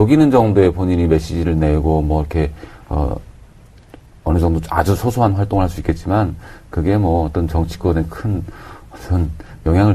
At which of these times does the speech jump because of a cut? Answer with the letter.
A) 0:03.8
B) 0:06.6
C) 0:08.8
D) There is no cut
B